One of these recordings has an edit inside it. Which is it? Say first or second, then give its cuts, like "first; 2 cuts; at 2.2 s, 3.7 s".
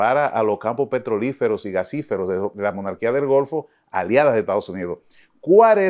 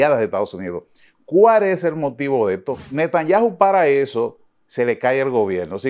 second; 1 cut; at 2.8 s